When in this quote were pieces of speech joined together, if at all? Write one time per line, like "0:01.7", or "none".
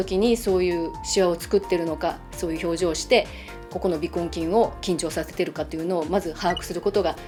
none